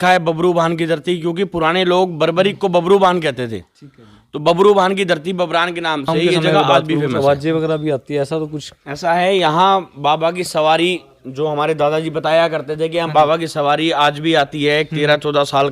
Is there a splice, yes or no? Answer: yes